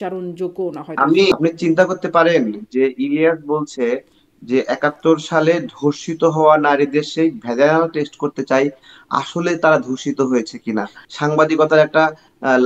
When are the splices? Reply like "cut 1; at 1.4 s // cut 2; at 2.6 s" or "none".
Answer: cut 1; at 1.3 s // cut 2; at 11.0 s